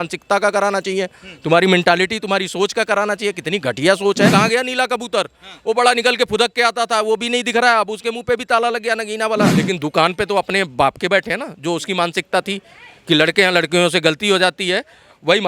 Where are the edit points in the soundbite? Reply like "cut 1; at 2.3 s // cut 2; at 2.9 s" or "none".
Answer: cut 1; at 4.3 s // cut 2; at 9.6 s